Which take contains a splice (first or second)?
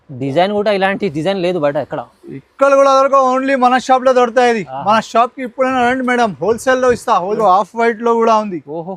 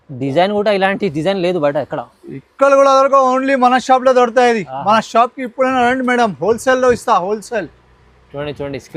first